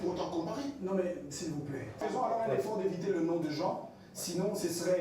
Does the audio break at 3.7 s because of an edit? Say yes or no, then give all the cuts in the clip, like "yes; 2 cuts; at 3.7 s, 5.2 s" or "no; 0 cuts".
no; 1 cut; at 2.0 s